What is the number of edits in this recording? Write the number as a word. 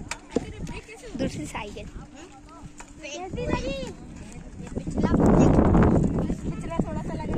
zero